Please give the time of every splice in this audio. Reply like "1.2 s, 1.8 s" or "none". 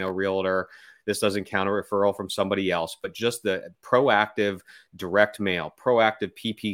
none